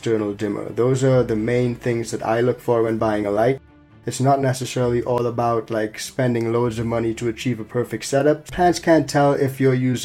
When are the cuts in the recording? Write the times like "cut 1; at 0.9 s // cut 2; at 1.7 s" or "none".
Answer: cut 1; at 3.9 s // cut 2; at 8.5 s